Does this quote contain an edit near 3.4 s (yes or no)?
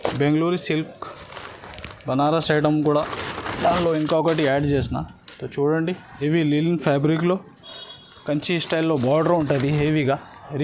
no